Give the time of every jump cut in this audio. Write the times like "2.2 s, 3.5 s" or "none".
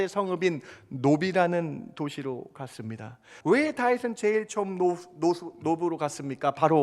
3.3 s